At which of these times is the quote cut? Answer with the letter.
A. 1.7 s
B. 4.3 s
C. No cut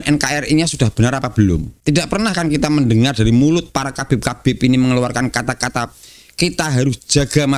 A